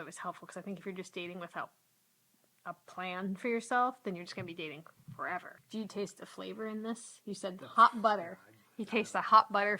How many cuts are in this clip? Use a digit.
1